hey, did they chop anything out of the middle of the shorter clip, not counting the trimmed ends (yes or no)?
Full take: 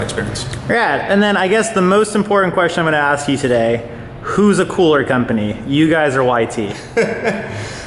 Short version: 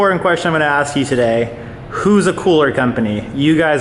no